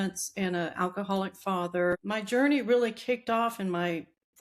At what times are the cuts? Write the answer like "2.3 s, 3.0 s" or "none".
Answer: 2.0 s